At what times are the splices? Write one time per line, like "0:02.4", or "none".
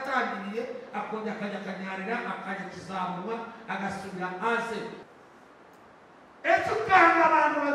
0:05.0